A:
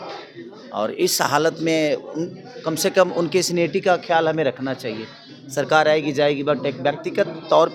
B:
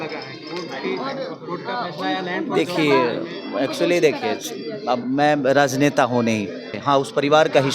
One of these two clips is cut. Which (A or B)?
B